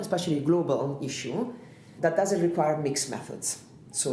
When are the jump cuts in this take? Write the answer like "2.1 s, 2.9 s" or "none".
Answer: 1.9 s